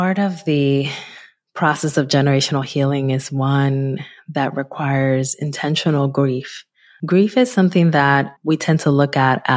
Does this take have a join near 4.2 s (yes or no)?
no